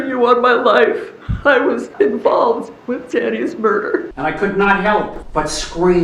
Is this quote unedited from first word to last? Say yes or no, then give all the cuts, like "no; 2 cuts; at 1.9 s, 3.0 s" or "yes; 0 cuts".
no; 4 cuts; at 1.9 s, 2.7 s, 4.1 s, 5.2 s